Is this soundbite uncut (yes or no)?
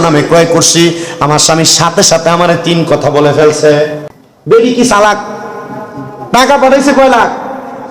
no